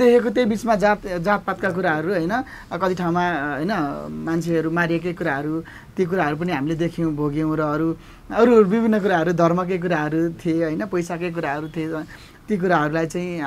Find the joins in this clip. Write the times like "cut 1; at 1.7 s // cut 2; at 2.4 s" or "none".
none